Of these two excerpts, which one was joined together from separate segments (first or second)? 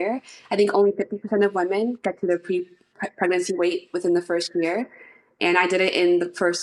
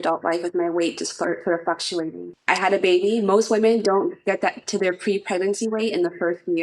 second